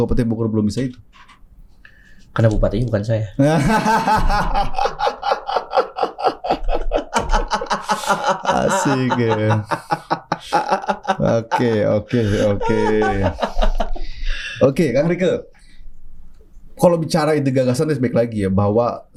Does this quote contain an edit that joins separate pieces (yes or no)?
no